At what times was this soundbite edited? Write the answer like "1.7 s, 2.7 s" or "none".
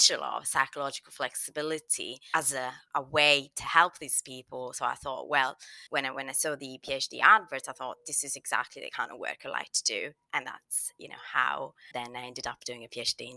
11.9 s